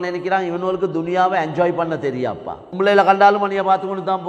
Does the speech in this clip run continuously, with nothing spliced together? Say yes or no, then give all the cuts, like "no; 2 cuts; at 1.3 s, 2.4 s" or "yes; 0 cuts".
no; 1 cut; at 2.6 s